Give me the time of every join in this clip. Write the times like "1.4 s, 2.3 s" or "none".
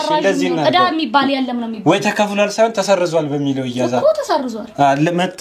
none